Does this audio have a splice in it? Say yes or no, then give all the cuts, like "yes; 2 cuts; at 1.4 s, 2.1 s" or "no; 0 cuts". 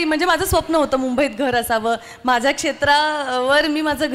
no; 0 cuts